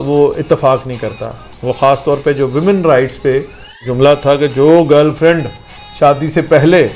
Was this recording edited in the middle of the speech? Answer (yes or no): yes